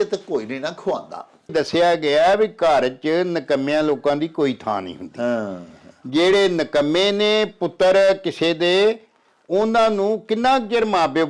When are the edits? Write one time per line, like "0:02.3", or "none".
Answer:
0:01.5